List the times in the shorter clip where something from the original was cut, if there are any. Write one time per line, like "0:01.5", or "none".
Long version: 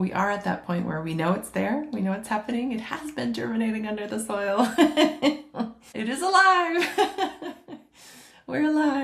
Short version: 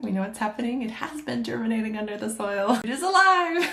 0:02.8